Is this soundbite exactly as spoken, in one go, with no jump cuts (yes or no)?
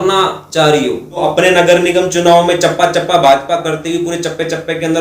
no